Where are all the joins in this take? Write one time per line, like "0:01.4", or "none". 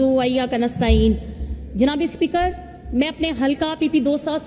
0:01.0